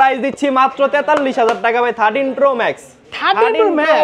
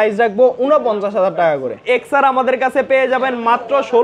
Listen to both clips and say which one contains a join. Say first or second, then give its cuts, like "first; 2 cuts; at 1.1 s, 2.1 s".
second; 1 cut; at 1.8 s